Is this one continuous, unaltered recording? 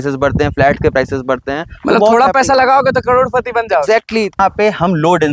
no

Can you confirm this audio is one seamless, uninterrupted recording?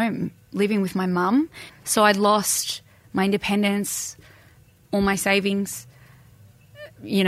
no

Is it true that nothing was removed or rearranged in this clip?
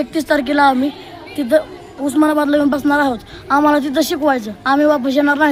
yes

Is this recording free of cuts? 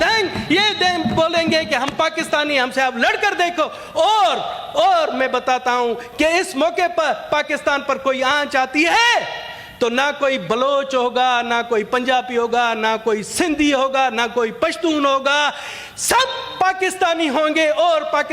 yes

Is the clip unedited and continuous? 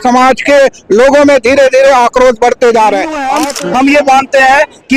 no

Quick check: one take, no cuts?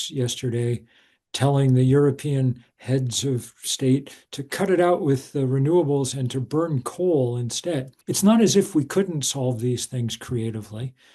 no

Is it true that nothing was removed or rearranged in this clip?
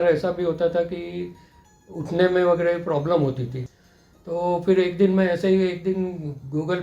no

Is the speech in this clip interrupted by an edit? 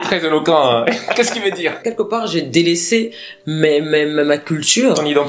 yes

